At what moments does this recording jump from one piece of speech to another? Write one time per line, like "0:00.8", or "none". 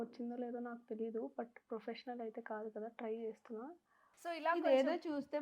0:04.4